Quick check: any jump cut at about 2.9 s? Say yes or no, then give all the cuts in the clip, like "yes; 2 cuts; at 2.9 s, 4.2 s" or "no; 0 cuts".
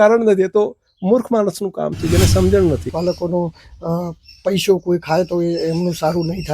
yes; 1 cut; at 2.9 s